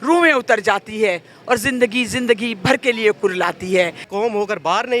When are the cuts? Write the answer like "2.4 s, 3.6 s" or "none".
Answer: 4.0 s